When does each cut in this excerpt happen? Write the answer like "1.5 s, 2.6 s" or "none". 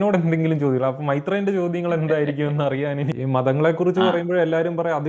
3.1 s